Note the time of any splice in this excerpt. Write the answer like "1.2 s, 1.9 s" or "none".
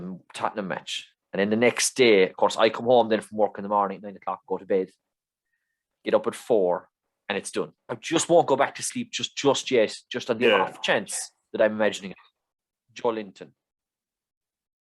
7.9 s, 12.7 s